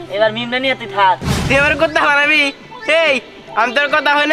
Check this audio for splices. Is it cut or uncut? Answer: cut